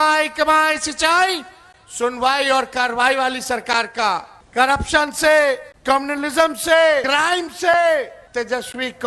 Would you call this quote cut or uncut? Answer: cut